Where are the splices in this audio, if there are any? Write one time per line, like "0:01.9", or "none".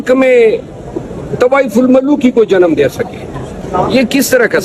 0:03.6

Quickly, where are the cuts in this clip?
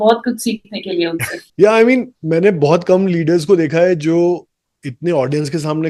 0:01.4

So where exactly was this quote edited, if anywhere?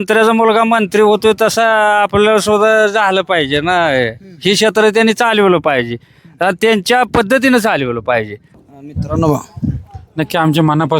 0:08.7

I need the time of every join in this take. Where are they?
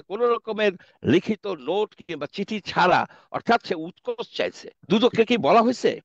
0:04.7

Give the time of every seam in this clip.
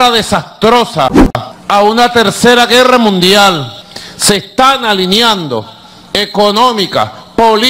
0:03.6

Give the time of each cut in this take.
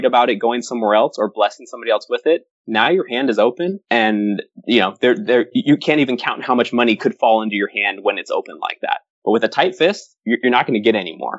0:10.1

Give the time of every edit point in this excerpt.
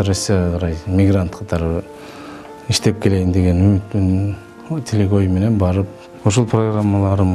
0:06.0

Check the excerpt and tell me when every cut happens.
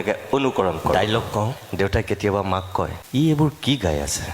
0:00.9
0:03.0

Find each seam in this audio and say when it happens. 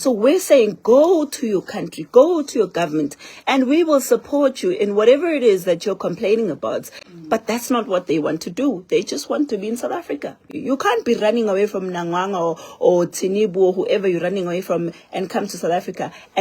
0:07.0
0:10.5

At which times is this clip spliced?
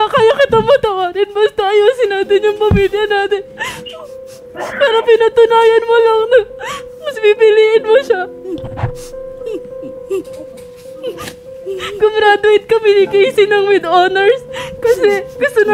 none

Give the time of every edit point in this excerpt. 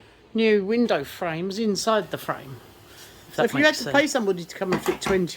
0:03.4

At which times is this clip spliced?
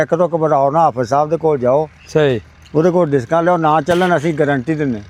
none

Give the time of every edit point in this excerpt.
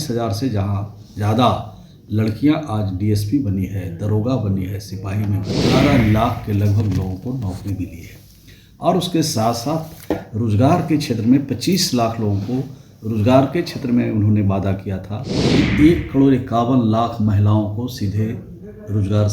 0:05.6
0:15.5

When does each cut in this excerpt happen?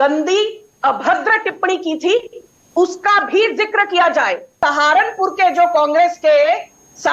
0:04.5

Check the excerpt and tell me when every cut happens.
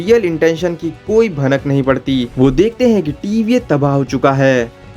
0:02.3

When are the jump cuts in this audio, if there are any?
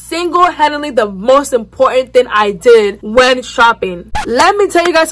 0:04.1

